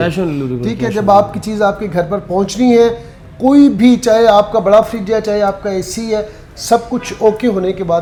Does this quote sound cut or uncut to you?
uncut